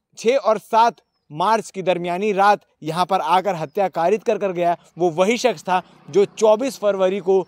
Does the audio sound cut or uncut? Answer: uncut